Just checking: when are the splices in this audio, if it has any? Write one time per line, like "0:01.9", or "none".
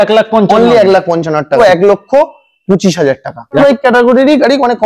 0:01.6
0:03.6